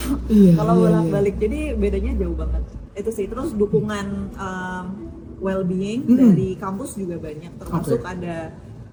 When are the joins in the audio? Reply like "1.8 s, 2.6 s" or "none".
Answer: none